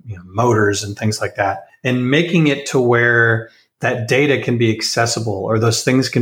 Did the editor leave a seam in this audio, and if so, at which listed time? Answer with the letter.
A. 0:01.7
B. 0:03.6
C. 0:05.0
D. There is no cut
A